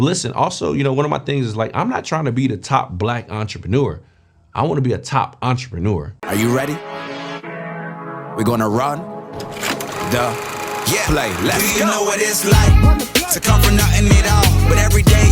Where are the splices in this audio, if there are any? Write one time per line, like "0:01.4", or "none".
0:06.1